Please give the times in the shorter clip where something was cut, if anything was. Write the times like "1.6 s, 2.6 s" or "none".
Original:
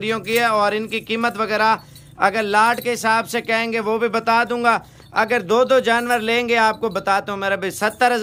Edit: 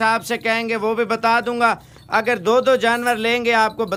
none